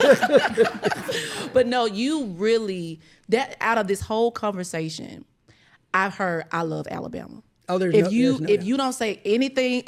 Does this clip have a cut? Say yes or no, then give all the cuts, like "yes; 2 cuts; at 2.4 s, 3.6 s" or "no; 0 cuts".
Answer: no; 0 cuts